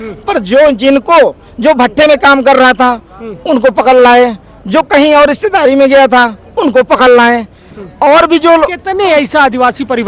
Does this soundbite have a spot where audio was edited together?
no; 0 cuts

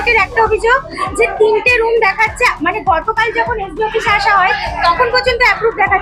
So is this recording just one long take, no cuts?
yes; 0 cuts

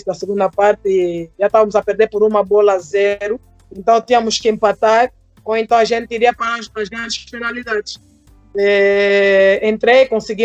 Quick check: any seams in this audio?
no; 0 cuts

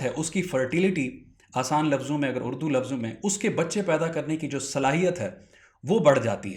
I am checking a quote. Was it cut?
no; 0 cuts

